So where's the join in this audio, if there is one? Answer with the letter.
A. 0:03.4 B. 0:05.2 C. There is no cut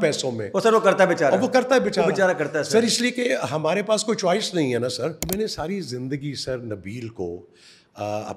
B